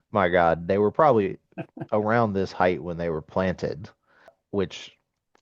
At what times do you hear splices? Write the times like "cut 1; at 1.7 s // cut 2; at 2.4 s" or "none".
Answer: cut 1; at 4.4 s